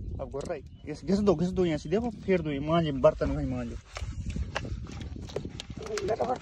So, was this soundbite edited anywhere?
no; 0 cuts

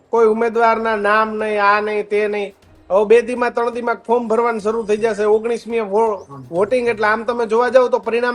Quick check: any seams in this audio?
no; 0 cuts

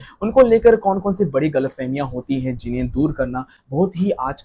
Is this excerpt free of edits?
yes; 0 cuts

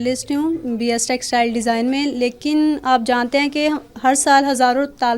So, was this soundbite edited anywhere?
no; 0 cuts

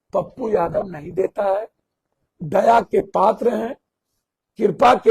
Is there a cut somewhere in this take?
no; 0 cuts

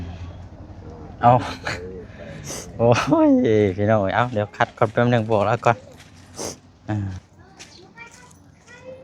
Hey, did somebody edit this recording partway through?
no; 0 cuts

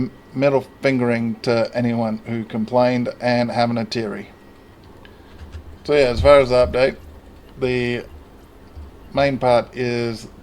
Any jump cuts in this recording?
yes; 1 cut; at 4.8 s

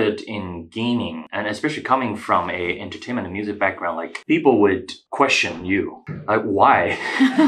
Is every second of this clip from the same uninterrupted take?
no; 4 cuts; at 1.2 s, 4.1 s, 4.9 s, 6.1 s

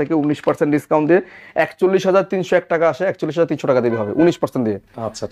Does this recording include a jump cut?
no; 0 cuts

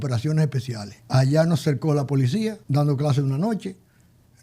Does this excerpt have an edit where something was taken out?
yes; 2 cuts; at 0.9 s, 2.6 s

